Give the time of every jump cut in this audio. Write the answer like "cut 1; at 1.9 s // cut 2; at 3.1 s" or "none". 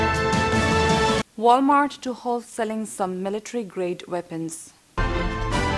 cut 1; at 1.3 s